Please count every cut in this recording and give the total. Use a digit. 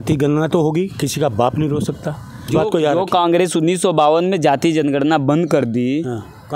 1